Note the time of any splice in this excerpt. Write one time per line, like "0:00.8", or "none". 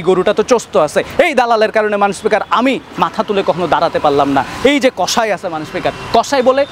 none